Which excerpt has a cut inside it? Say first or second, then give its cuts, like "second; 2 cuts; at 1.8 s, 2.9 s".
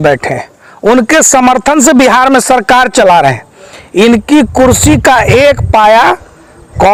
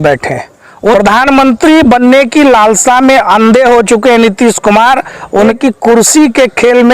second; 2 cuts; at 0.9 s, 5.6 s